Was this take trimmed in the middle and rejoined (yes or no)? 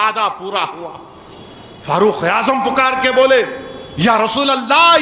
no